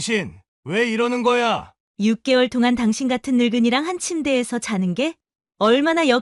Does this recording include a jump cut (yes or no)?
yes